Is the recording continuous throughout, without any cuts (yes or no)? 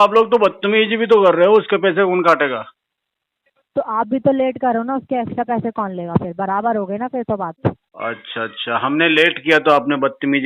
yes